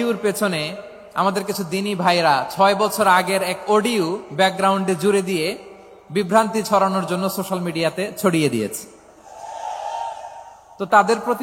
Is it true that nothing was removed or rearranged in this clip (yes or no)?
yes